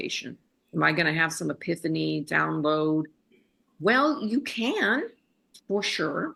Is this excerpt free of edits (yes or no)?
yes